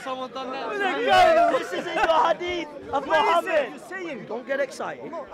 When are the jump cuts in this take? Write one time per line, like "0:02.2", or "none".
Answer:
0:03.8